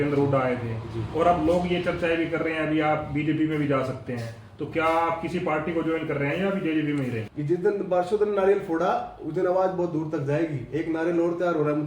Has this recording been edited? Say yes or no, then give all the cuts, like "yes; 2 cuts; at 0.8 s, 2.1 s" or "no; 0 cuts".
yes; 1 cut; at 7.3 s